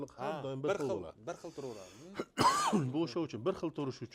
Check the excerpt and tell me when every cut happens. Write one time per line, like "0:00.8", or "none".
none